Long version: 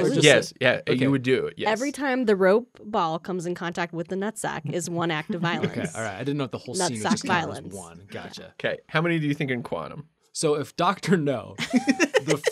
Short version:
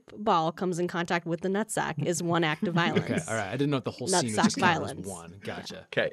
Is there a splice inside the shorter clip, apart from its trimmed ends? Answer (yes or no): no